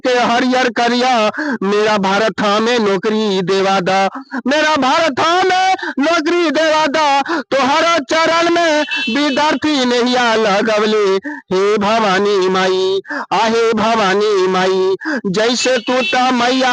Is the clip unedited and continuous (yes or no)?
yes